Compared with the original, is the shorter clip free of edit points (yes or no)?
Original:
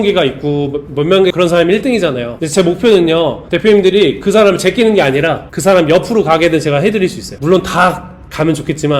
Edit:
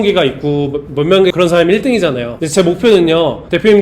yes